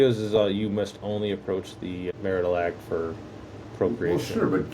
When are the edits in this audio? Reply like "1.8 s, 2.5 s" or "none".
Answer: 2.1 s